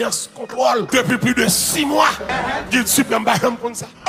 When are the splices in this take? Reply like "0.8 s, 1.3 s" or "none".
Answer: none